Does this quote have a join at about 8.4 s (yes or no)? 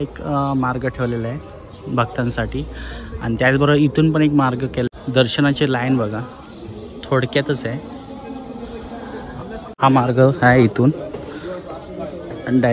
no